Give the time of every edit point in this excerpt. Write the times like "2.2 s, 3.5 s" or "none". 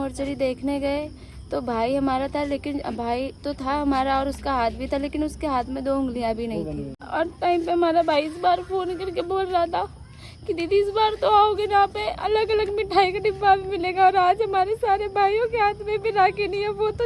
7.0 s